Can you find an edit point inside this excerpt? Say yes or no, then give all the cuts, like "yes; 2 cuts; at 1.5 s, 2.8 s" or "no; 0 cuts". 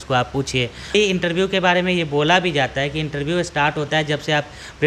yes; 1 cut; at 0.9 s